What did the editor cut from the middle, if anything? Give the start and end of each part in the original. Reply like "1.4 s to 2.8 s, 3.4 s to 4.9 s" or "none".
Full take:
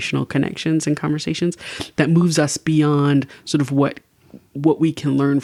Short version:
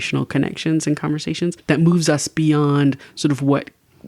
1.6 s to 1.9 s